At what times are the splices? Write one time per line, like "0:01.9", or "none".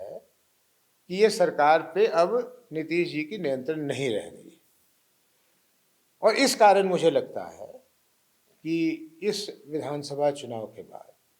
none